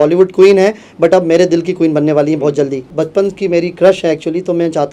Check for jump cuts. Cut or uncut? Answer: cut